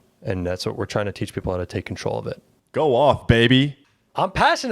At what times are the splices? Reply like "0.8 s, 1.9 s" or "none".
2.5 s, 3.8 s